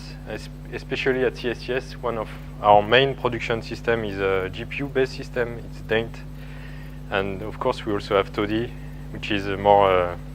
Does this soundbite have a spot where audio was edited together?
yes; 1 cut; at 5.5 s

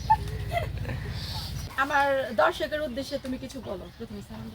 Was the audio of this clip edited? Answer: yes; 1 cut; at 1.7 s

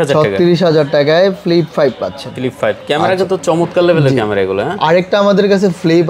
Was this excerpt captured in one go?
yes; 0 cuts

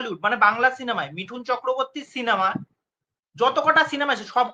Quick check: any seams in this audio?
no; 0 cuts

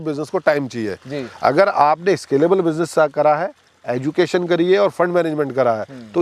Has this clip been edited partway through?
no; 0 cuts

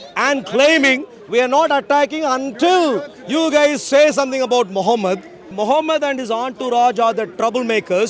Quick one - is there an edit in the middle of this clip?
yes; 1 cut; at 5.5 s

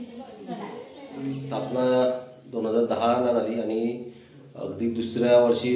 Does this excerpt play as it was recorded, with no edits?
no; 1 cut; at 1.4 s

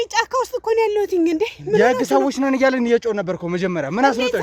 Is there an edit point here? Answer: no; 0 cuts

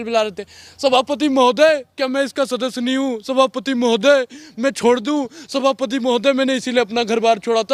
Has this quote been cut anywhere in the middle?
no; 0 cuts

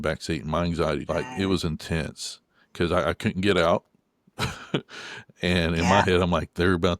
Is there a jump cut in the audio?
yes; 1 cut; at 1.0 s

